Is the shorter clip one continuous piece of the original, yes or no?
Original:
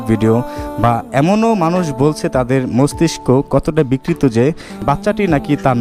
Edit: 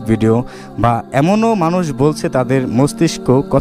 yes